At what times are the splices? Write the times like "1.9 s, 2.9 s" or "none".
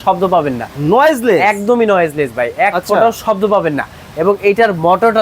none